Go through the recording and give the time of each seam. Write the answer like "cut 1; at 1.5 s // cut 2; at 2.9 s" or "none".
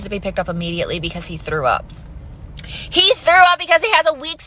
cut 1; at 1.9 s